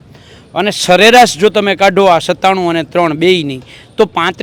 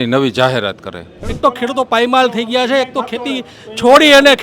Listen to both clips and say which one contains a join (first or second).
second